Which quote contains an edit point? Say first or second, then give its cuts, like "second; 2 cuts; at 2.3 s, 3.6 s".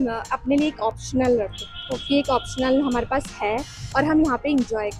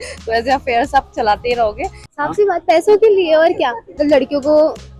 second; 2 cuts; at 2.1 s, 4.0 s